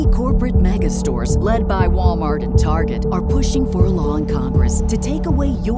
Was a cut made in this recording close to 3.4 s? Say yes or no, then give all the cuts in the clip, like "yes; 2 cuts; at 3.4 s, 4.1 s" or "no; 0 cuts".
no; 0 cuts